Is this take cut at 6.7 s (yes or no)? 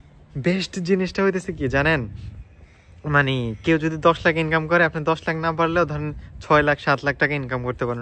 no